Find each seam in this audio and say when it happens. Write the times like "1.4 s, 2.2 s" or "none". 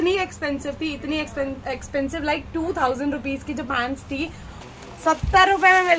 4.5 s